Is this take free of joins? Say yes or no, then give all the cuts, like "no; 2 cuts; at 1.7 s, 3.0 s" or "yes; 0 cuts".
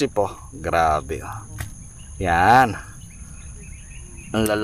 yes; 0 cuts